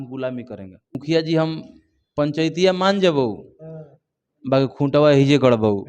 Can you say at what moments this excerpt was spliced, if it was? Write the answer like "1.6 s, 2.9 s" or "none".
1.0 s